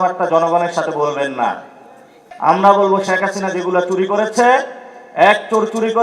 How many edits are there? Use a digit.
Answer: 1